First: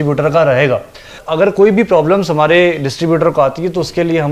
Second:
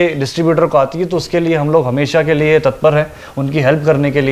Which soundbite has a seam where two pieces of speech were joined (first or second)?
first